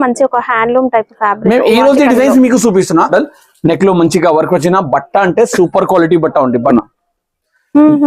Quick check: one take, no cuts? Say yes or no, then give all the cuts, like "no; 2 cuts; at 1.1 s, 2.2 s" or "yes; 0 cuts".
no; 2 cuts; at 3.1 s, 6.7 s